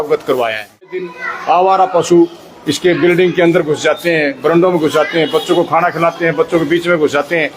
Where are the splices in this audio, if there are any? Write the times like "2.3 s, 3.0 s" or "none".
1.1 s